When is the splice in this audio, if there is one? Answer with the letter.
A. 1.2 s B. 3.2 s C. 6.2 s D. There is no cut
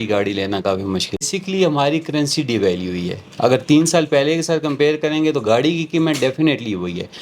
A